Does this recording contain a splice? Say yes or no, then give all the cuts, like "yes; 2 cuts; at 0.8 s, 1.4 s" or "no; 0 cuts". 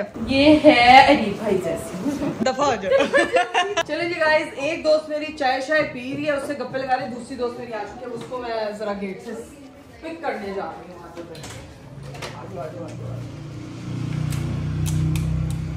no; 0 cuts